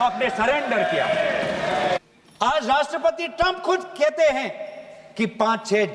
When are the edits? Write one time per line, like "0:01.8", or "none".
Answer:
0:02.0